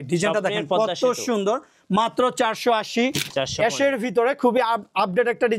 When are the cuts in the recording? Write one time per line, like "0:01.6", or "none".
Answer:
0:03.3